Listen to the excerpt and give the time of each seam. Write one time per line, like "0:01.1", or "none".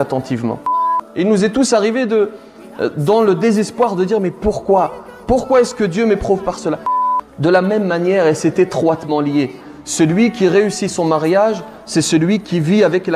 0:01.0
0:07.1